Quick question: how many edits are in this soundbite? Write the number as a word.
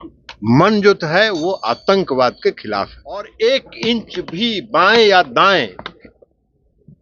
one